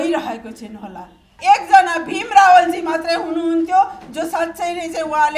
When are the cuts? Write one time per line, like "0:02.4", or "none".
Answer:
0:01.4